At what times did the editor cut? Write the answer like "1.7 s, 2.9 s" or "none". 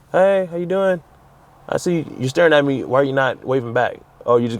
none